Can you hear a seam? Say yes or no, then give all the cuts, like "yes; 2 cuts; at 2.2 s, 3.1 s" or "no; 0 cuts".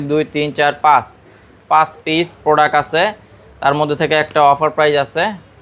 no; 0 cuts